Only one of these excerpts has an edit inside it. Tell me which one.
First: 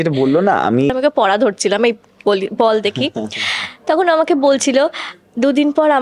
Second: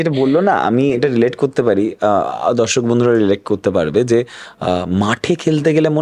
first; 1 cut; at 0.9 s

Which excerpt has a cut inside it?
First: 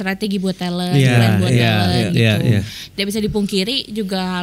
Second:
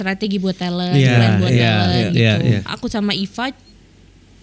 second; 1 cut; at 2.7 s

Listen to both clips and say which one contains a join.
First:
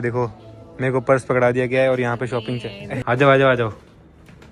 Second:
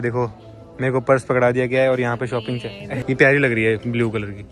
first; 1 cut; at 3.0 s

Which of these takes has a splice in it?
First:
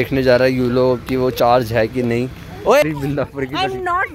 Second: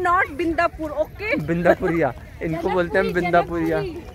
first; 1 cut; at 2.9 s

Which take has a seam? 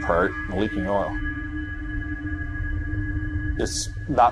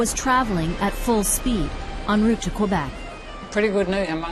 second; 1 cut; at 2.7 s

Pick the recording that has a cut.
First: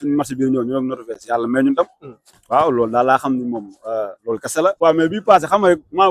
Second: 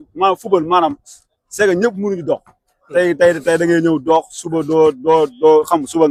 first; 1 cut; at 4.8 s

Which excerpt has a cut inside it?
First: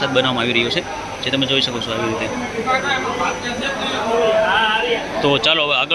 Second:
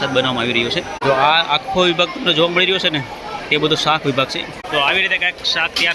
second; 2 cuts; at 1.0 s, 4.6 s

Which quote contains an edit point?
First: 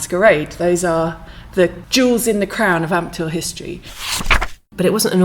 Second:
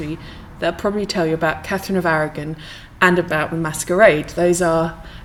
first; 1 cut; at 4.1 s

